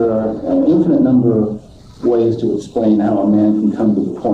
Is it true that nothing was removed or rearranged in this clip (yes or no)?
yes